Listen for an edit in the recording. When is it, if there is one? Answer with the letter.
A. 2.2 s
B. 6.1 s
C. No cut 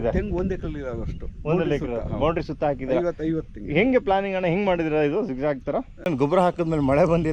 B